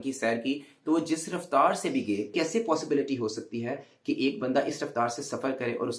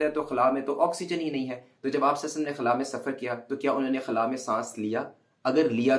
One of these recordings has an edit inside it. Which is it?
first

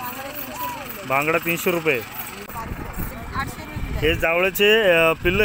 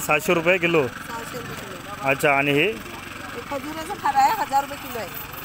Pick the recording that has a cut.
first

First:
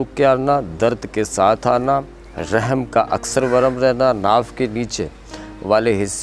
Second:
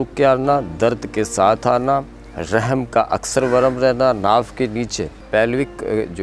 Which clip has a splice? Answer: second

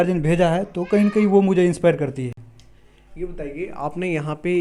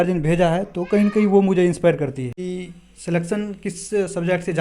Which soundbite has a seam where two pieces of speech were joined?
second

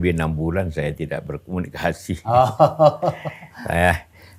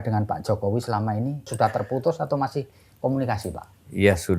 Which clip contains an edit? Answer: second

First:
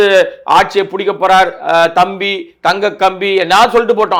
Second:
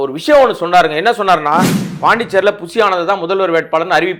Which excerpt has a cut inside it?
second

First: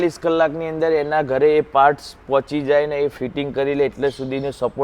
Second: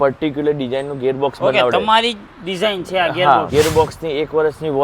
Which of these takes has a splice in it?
second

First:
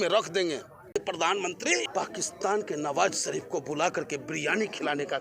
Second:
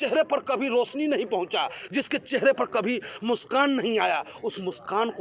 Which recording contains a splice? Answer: first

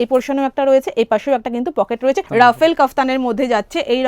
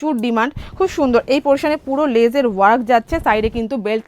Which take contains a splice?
first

